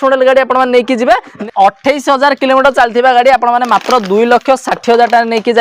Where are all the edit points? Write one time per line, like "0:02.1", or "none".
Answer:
0:01.4